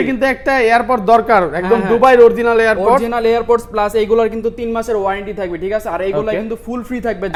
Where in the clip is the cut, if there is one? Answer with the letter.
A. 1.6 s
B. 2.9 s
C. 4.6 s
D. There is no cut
D